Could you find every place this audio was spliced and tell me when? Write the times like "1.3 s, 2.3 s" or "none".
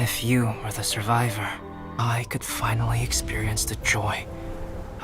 1.9 s